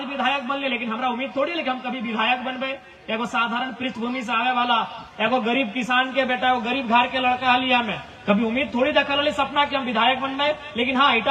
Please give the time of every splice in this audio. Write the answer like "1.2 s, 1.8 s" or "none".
none